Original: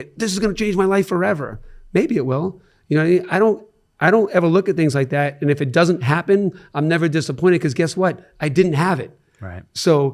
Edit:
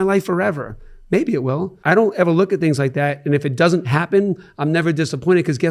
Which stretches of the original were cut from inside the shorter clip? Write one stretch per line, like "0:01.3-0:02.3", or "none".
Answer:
0:02.5-0:03.9